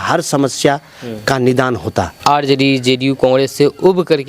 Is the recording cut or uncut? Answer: cut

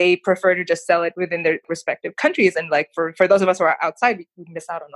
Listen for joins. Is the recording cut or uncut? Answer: cut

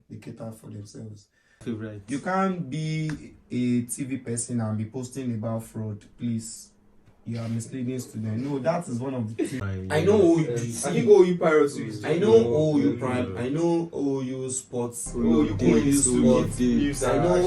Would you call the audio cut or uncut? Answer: cut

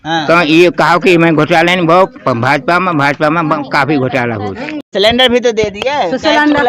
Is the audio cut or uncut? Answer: cut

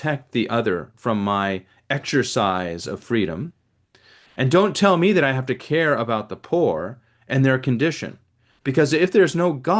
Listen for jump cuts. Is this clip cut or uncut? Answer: cut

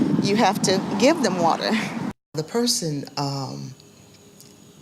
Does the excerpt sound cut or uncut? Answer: cut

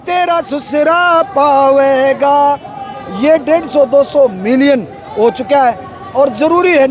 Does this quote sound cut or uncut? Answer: uncut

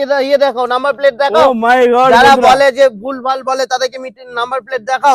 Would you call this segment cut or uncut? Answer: uncut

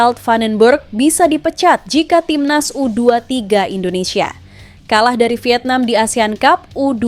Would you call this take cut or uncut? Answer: uncut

